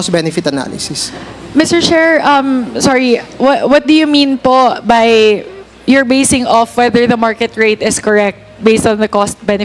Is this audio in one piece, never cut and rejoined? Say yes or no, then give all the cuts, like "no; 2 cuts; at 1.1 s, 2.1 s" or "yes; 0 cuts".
yes; 0 cuts